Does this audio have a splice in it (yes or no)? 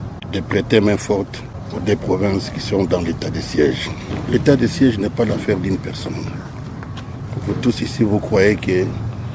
no